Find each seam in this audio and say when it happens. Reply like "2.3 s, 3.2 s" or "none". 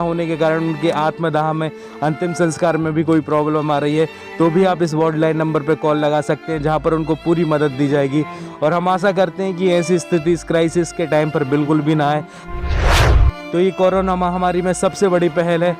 12.4 s, 13.4 s